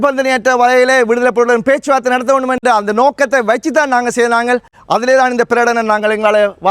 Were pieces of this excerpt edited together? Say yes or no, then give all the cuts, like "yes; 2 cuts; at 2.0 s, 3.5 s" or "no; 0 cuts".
no; 0 cuts